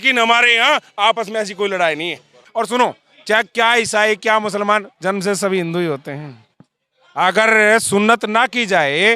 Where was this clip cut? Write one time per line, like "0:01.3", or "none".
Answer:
0:02.4